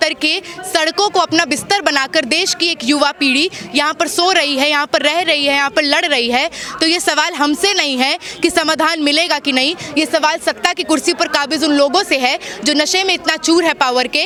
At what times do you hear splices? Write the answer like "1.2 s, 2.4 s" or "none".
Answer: none